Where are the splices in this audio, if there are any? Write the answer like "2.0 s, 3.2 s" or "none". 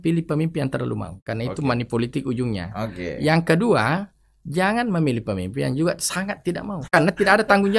1.2 s, 6.9 s